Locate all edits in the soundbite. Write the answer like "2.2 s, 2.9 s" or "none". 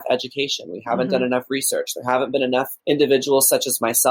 2.7 s